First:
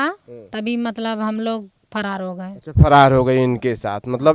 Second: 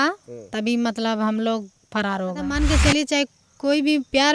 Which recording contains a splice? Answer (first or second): second